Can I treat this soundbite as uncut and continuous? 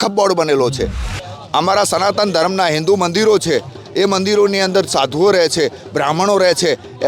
no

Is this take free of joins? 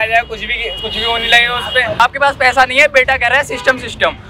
no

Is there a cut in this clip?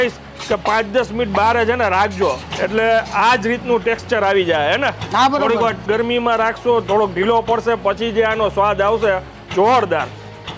no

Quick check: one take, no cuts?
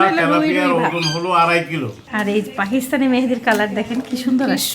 no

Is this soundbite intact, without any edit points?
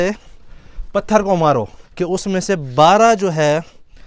no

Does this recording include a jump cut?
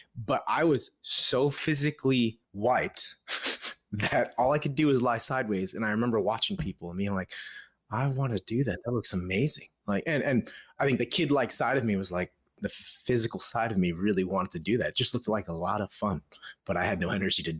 yes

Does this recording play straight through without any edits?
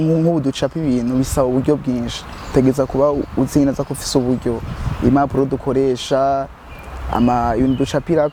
yes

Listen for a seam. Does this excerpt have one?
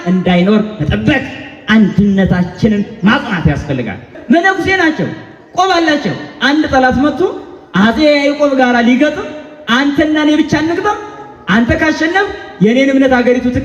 yes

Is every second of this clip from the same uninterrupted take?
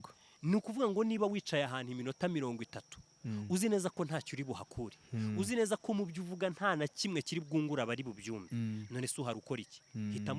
yes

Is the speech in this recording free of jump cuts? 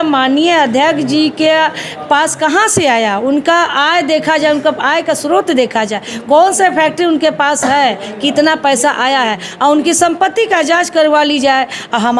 yes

